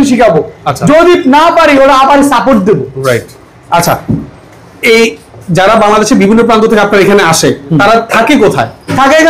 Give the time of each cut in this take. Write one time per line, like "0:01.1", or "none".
none